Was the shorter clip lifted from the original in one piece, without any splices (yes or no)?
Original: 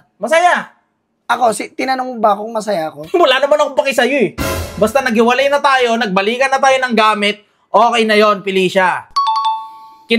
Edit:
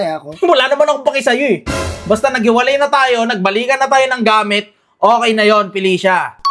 yes